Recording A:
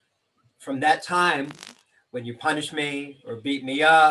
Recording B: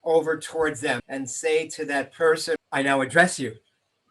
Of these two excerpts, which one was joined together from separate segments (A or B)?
B